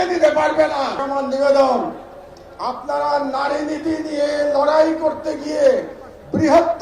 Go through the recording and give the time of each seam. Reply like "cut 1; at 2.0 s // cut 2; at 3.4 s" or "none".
cut 1; at 1.1 s